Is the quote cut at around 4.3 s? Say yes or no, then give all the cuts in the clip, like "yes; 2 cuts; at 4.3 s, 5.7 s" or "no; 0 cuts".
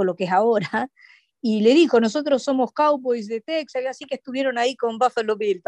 no; 0 cuts